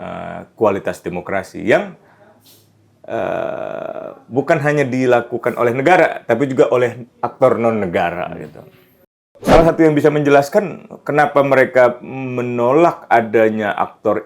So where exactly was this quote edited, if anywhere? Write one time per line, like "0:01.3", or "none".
0:09.3